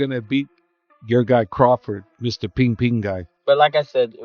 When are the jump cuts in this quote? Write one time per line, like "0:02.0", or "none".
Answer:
0:03.3